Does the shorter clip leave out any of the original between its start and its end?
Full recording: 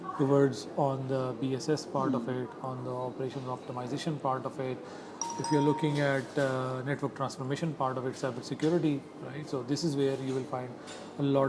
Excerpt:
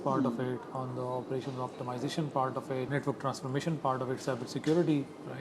yes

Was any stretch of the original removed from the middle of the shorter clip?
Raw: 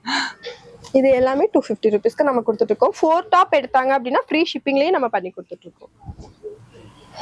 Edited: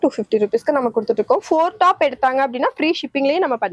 no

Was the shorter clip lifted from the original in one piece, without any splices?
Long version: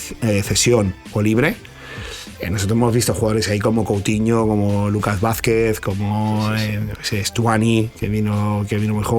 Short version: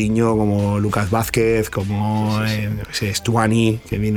yes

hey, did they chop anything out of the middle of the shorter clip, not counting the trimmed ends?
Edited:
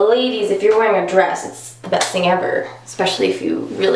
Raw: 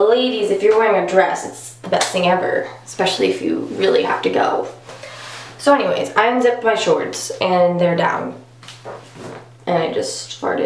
no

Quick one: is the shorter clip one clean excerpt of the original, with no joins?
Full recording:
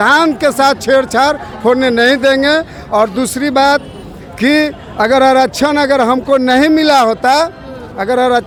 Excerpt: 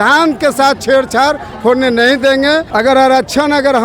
no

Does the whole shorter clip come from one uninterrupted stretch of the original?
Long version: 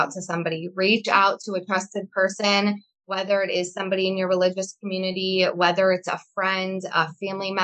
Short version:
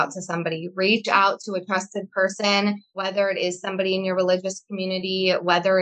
no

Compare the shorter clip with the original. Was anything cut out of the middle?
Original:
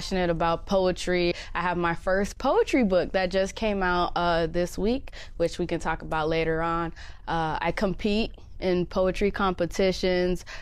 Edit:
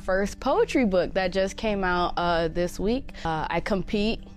yes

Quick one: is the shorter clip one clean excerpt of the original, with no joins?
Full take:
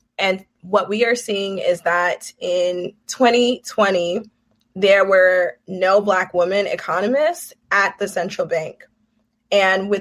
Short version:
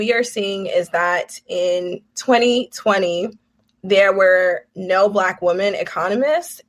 yes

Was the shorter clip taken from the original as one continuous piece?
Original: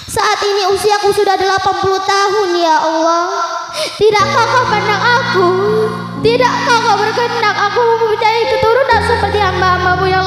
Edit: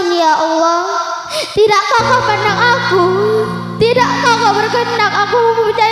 yes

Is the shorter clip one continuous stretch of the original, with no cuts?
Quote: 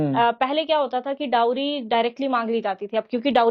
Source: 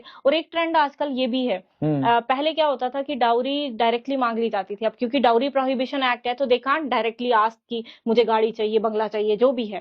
yes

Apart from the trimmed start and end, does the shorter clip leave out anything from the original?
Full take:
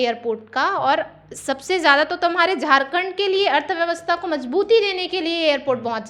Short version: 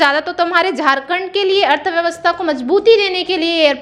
no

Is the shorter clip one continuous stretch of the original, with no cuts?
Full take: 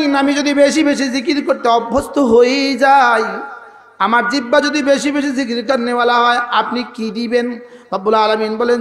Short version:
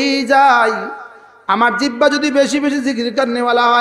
yes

